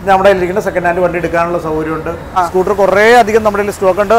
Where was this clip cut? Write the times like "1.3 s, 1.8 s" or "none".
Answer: 2.3 s